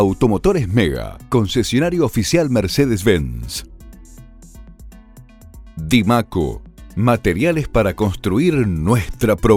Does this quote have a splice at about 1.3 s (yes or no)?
no